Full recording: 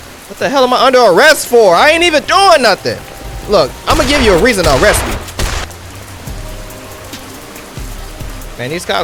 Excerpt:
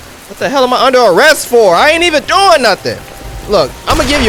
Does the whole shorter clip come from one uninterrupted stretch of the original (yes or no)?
yes